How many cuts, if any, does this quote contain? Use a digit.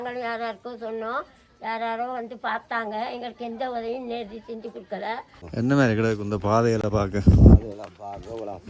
1